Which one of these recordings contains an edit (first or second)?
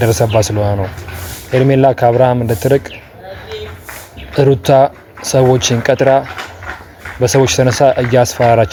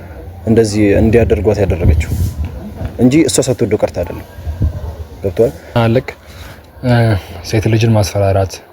second